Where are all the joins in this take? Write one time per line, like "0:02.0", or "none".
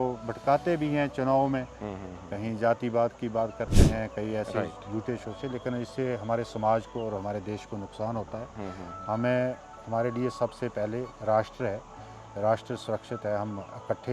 none